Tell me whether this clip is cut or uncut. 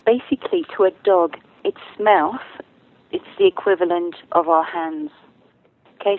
cut